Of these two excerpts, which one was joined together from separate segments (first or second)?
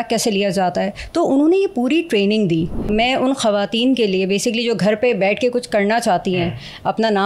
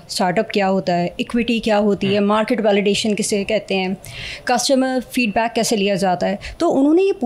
first